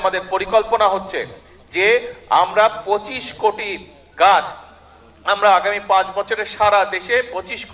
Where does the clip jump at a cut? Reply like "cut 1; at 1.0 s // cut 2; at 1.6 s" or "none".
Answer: none